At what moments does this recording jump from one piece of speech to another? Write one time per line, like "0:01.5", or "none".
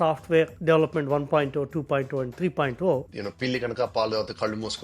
0:03.0